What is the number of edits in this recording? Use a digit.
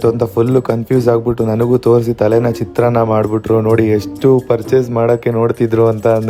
0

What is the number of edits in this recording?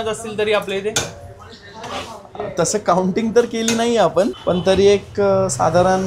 0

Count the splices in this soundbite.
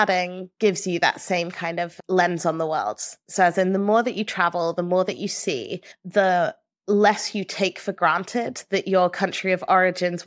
0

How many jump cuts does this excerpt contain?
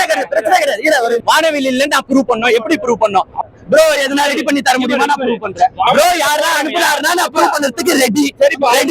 3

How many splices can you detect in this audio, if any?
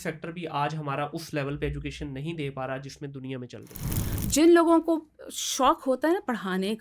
1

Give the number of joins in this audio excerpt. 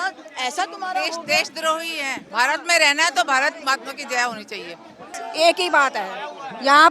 2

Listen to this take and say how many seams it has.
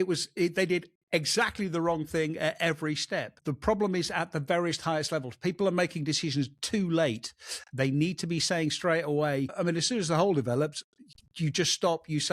2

